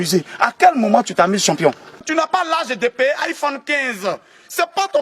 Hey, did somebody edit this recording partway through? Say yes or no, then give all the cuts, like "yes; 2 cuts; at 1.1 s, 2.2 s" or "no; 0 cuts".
yes; 1 cut; at 2.0 s